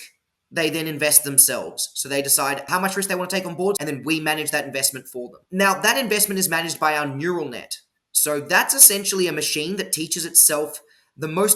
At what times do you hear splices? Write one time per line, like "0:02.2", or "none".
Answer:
0:02.6
0:03.8
0:05.4